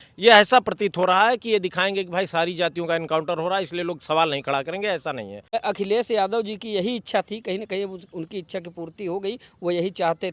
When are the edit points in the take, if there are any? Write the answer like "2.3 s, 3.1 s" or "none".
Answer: 5.3 s

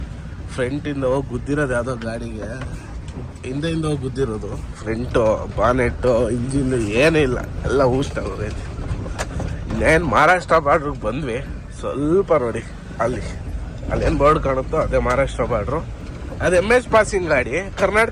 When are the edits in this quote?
none

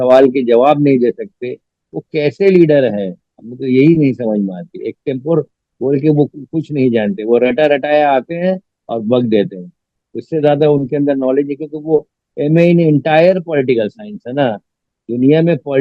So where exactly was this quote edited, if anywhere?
none

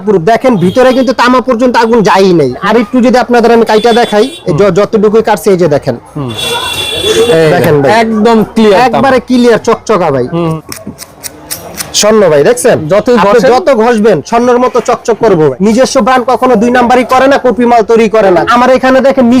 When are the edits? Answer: 2.6 s, 6.4 s, 10.6 s, 15.5 s, 18.4 s

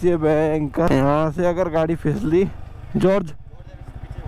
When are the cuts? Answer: 0.9 s, 2.8 s

